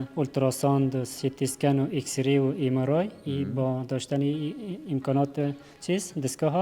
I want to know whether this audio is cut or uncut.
uncut